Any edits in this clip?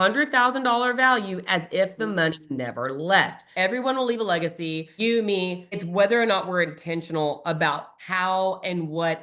yes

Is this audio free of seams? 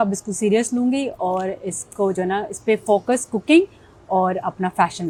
yes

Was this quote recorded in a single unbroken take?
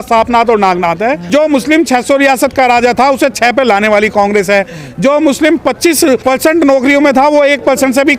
no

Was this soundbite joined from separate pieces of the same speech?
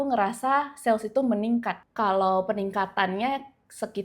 yes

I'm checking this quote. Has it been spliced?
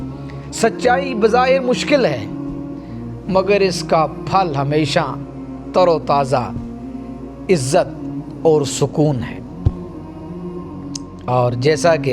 yes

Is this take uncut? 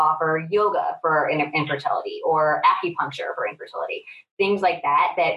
yes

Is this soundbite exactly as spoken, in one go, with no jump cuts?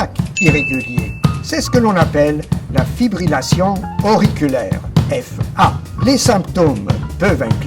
no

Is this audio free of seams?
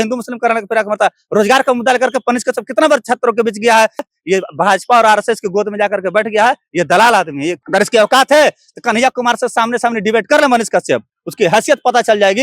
no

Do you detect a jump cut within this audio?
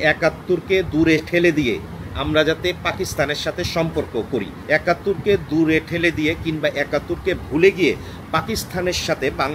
yes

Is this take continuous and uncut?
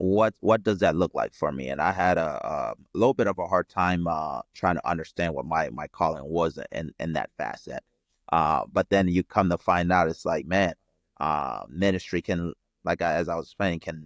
yes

